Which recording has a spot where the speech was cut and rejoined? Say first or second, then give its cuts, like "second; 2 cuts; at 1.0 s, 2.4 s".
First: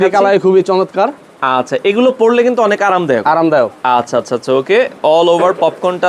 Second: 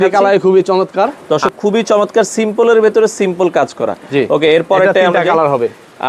second; 1 cut; at 1.2 s